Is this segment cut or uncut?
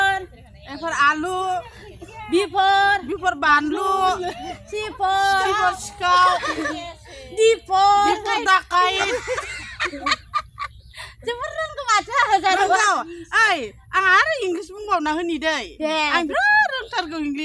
uncut